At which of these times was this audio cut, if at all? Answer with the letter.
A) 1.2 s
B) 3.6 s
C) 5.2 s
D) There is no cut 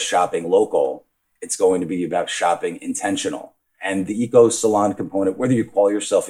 B